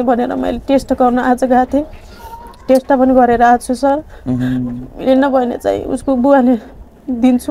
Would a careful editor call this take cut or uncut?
uncut